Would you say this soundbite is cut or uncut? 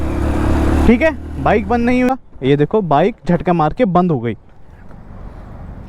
cut